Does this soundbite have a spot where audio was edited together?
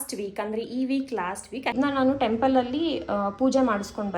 yes; 1 cut; at 1.7 s

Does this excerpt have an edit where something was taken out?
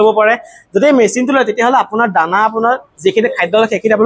no; 0 cuts

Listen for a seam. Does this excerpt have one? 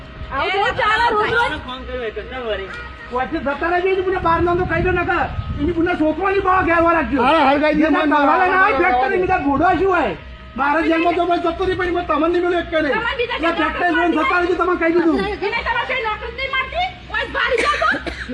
no; 0 cuts

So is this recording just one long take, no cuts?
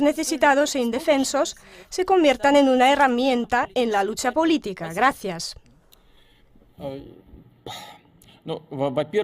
no; 1 cut; at 6.9 s

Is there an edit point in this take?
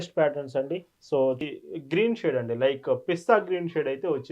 yes; 1 cut; at 1.4 s

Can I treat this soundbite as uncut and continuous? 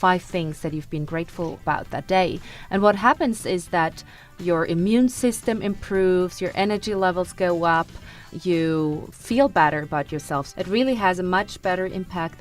no; 4 cuts; at 1.6 s, 8.2 s, 9.1 s, 10.5 s

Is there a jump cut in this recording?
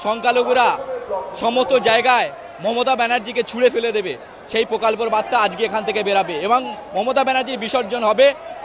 no; 0 cuts

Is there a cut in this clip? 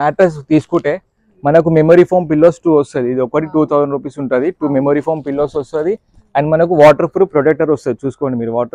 no; 0 cuts

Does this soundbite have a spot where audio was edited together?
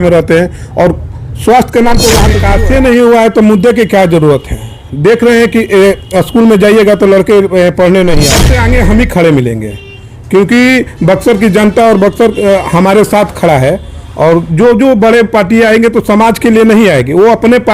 yes; 2 cuts; at 2.4 s, 8.5 s

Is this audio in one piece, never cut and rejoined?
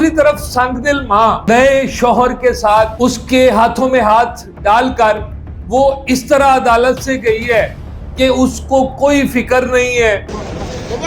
no; 3 cuts; at 1.4 s, 2.9 s, 10.3 s

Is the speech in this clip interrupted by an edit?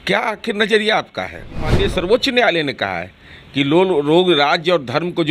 yes; 1 cut; at 1.7 s

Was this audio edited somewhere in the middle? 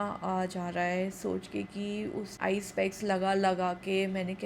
yes; 1 cut; at 2.3 s

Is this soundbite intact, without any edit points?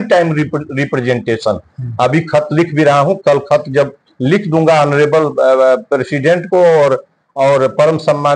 yes; 0 cuts

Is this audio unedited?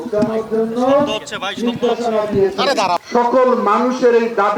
no; 1 cut; at 3.0 s

